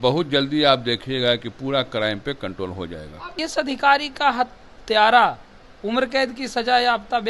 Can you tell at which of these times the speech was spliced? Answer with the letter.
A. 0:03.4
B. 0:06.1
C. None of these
A